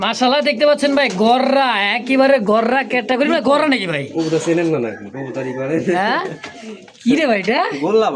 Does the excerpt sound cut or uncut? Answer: uncut